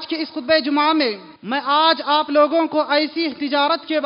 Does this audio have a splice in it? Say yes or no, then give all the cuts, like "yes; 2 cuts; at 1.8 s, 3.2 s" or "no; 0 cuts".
yes; 1 cut; at 1.3 s